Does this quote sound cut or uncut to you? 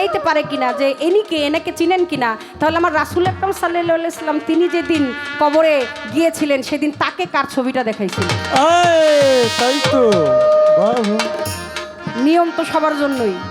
uncut